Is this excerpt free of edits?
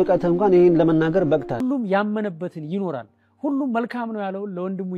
no; 1 cut; at 1.6 s

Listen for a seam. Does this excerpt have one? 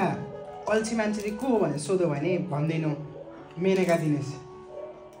no; 0 cuts

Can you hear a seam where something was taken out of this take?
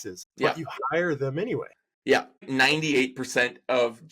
yes; 1 cut; at 2.4 s

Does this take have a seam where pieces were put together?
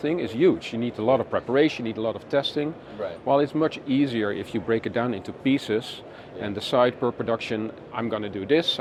no; 0 cuts

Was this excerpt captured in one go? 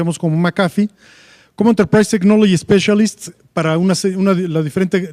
no; 1 cut; at 4.1 s

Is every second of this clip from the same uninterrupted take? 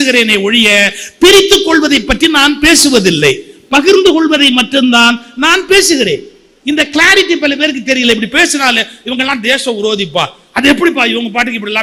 yes; 0 cuts

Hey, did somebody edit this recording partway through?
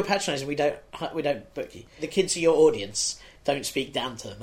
yes; 1 cut; at 2.0 s

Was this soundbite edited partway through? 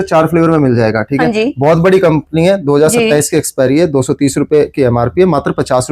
no; 0 cuts

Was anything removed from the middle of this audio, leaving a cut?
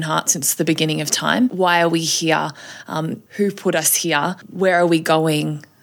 yes; 3 cuts; at 1.5 s, 3.2 s, 4.4 s

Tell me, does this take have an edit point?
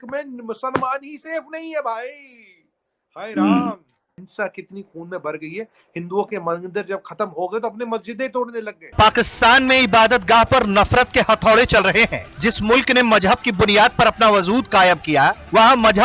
yes; 2 cuts; at 4.3 s, 8.9 s

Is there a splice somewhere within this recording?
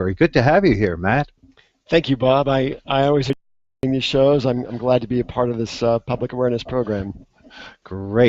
no; 0 cuts

